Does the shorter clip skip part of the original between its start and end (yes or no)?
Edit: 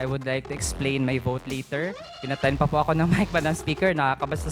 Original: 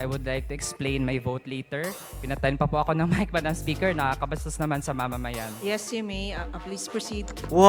no